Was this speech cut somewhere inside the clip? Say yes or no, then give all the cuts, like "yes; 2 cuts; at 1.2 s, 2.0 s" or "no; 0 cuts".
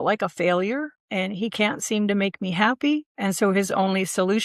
yes; 2 cuts; at 1.0 s, 3.1 s